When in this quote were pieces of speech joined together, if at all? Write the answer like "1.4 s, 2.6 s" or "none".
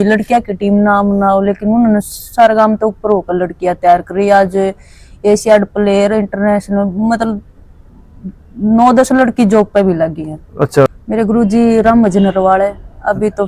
10.9 s

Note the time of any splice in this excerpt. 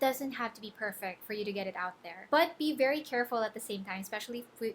2.1 s

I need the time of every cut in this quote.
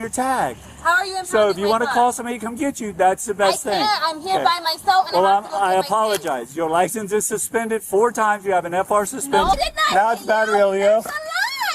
9.6 s

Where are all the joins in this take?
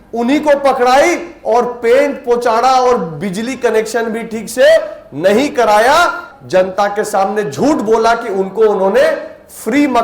6.3 s

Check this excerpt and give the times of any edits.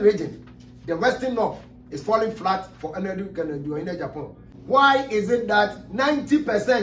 4.5 s

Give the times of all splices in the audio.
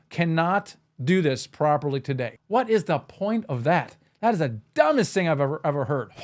2.3 s

